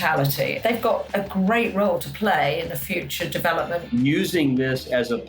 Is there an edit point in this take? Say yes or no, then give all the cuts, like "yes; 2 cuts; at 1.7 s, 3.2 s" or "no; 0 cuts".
yes; 1 cut; at 3.9 s